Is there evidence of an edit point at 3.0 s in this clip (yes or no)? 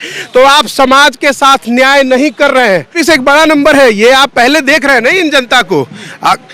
yes